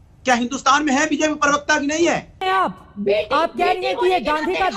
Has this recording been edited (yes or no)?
yes